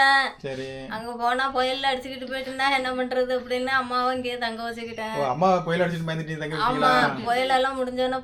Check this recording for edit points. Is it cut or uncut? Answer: uncut